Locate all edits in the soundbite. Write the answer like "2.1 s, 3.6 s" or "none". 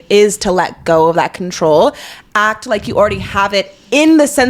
none